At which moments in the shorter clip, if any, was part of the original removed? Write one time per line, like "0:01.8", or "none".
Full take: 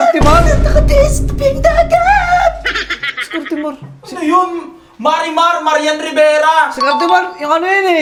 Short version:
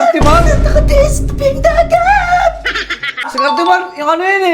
0:03.3